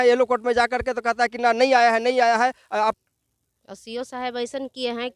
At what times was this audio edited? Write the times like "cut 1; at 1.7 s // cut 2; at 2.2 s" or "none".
cut 1; at 3.0 s

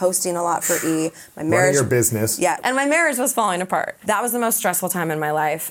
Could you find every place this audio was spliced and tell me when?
cut 1; at 2.6 s // cut 2; at 3.9 s

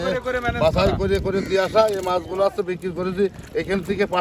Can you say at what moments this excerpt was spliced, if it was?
none

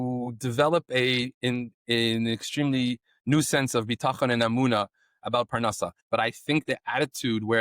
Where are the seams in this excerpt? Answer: cut 1; at 6.0 s

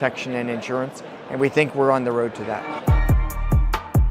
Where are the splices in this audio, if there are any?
cut 1; at 2.8 s

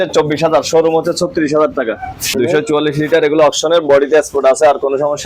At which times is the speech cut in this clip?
cut 1; at 2.3 s

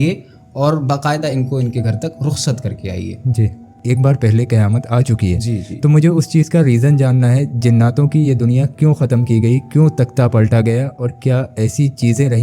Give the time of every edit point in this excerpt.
cut 1; at 3.7 s

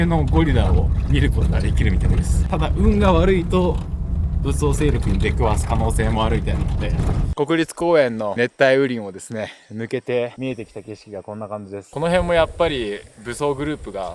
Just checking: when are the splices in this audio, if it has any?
cut 1; at 2.4 s // cut 2; at 7.3 s // cut 3; at 11.9 s

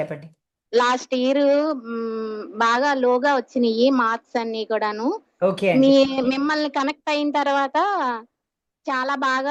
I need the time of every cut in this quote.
none

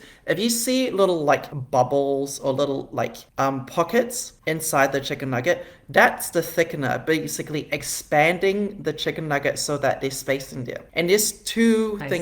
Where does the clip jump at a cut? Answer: cut 1; at 1.5 s // cut 2; at 3.2 s // cut 3; at 4.3 s // cut 4; at 10.8 s

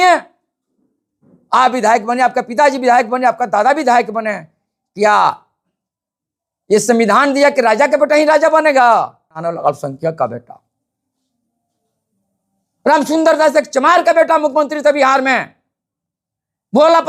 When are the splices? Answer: cut 1; at 9.4 s

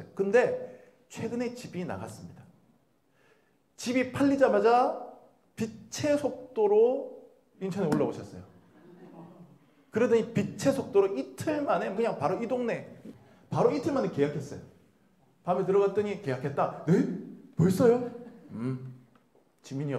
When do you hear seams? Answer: cut 1; at 12.0 s // cut 2; at 12.9 s

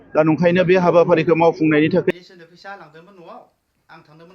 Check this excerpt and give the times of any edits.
cut 1; at 2.1 s

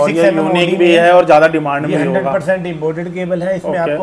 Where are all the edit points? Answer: none

